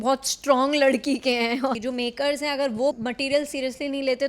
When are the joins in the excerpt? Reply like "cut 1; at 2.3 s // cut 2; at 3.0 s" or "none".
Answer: cut 1; at 1.8 s // cut 2; at 3.0 s